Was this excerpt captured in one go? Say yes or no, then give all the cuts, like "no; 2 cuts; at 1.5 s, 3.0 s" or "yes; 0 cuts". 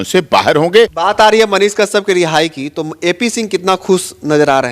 no; 1 cut; at 0.9 s